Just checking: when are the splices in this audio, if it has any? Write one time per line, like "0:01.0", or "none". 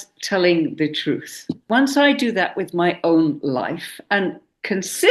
0:01.6